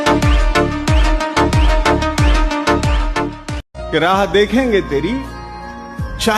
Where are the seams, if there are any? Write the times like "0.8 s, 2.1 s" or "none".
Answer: 3.6 s